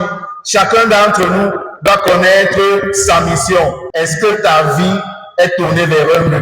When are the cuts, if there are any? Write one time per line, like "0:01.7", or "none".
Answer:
0:03.8